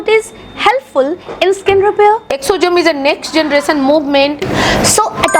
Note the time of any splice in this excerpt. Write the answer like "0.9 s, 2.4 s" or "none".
4.4 s